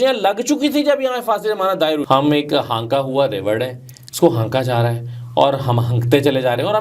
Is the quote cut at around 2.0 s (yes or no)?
yes